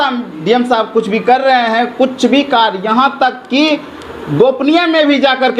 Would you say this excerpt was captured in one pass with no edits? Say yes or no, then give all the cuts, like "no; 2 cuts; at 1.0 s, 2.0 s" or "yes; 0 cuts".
yes; 0 cuts